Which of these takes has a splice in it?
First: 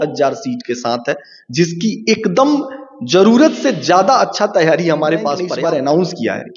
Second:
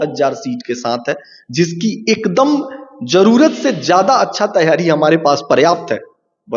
first; 1 cut; at 5.4 s

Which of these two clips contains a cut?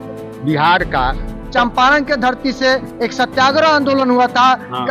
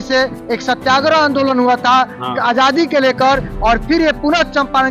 first; 1 cut; at 1.4 s

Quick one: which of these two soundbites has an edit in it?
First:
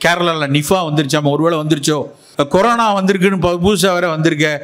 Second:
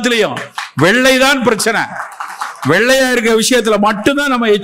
first; 1 cut; at 2.2 s

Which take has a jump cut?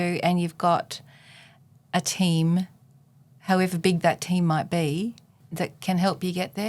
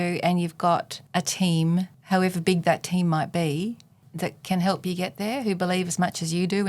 second; 2 cuts; at 1.0 s, 2.0 s

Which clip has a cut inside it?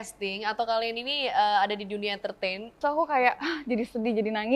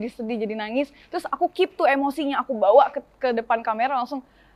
first; 1 cut; at 2.7 s

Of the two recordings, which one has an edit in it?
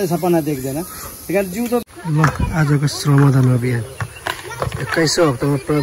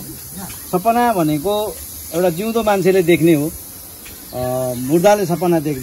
first; 1 cut; at 1.8 s

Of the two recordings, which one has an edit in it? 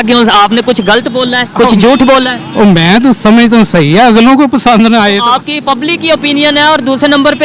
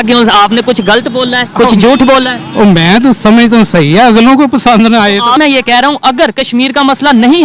second; 1 cut; at 5.4 s

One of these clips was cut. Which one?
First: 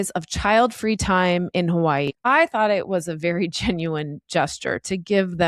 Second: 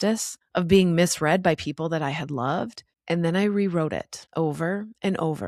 first; 1 cut; at 2.1 s

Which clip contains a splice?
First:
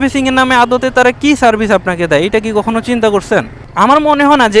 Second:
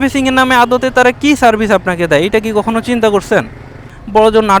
first; 1 cut; at 3.6 s

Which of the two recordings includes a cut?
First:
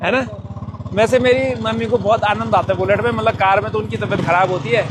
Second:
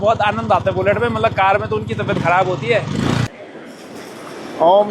second; 1 cut; at 3.9 s

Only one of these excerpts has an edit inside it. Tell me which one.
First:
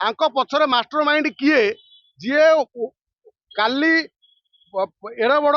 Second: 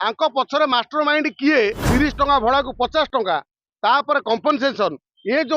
second; 1 cut; at 1.8 s

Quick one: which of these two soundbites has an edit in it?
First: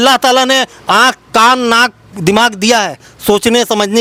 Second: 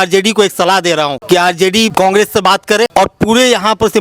second; 3 cuts; at 1.2 s, 1.9 s, 2.9 s

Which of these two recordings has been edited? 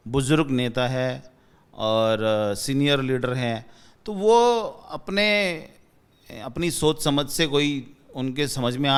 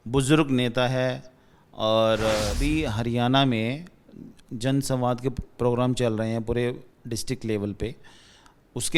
second; 1 cut; at 2.5 s

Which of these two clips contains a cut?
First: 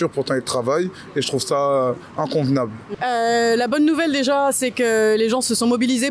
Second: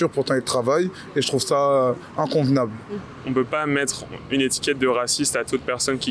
second; 1 cut; at 2.9 s

